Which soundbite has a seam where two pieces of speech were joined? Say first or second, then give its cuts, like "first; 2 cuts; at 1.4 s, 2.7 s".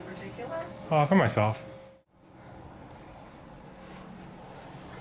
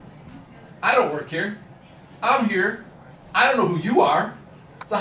first; 1 cut; at 1.8 s